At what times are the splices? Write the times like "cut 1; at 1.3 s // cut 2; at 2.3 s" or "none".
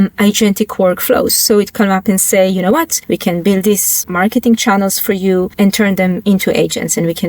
cut 1; at 3.0 s // cut 2; at 4.0 s // cut 3; at 5.5 s